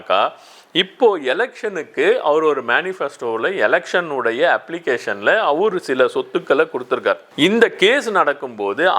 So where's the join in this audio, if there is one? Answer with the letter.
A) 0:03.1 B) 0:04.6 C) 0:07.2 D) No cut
C